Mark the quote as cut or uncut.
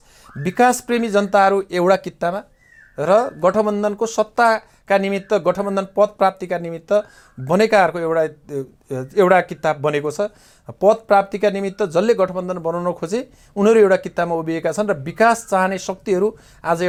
uncut